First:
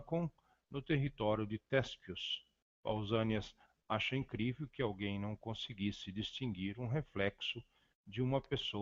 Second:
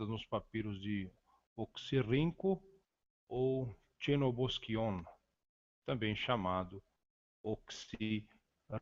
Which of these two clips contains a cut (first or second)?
first